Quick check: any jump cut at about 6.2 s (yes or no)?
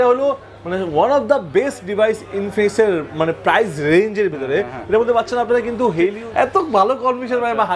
yes